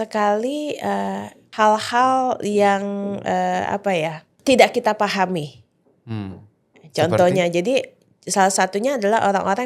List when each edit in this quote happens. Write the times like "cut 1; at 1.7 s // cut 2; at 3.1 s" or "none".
cut 1; at 1.4 s // cut 2; at 4.3 s